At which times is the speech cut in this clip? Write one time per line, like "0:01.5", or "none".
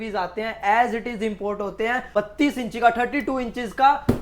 0:02.1